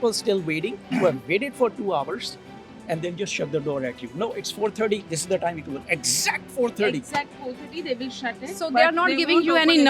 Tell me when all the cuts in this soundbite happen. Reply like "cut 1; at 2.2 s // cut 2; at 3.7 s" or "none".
none